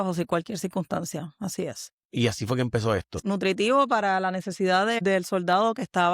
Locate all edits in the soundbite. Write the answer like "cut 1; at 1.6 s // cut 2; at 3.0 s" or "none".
cut 1; at 3.2 s // cut 2; at 5.0 s